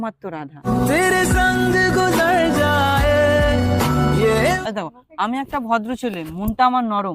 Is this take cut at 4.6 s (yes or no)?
yes